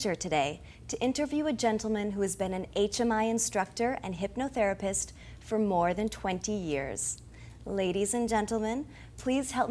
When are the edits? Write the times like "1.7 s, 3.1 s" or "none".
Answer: 4.5 s